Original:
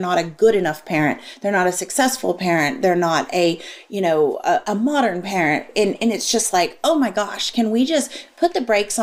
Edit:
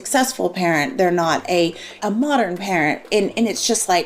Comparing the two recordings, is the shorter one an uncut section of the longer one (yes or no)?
no